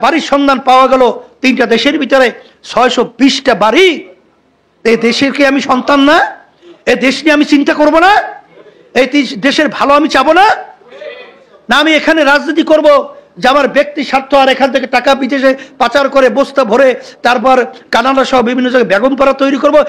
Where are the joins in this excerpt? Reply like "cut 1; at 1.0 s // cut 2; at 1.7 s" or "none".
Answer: none